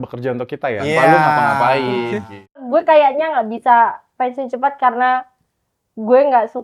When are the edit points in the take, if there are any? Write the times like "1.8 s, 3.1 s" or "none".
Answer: 2.6 s